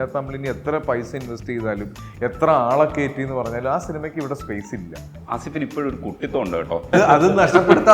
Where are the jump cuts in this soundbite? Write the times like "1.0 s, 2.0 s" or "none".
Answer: 5.1 s, 6.9 s